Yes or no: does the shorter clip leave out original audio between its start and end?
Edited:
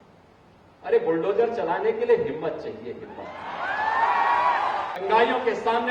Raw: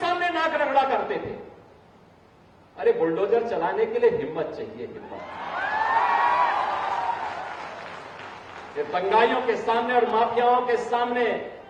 yes